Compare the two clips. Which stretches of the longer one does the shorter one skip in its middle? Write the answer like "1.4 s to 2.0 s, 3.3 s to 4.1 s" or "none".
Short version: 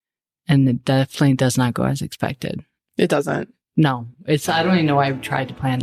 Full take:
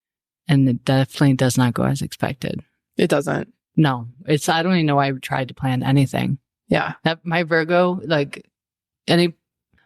none